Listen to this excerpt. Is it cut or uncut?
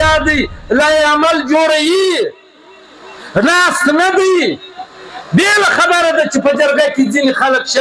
uncut